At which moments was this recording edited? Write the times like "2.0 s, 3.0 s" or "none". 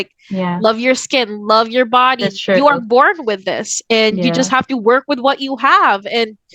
none